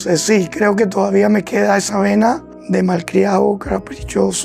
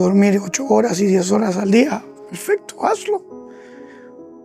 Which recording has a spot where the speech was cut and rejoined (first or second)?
first